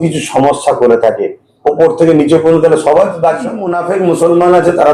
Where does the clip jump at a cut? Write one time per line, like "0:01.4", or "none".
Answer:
0:03.7